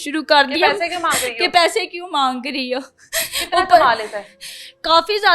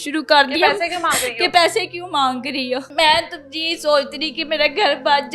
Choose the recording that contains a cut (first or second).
second